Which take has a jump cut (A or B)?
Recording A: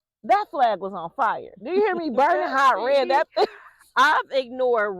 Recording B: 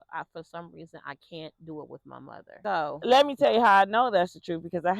B